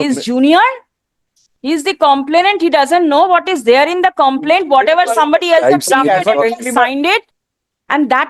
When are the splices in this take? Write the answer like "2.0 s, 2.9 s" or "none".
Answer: 7.3 s